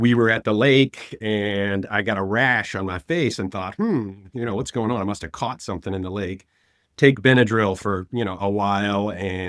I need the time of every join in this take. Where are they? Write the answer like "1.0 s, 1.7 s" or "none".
none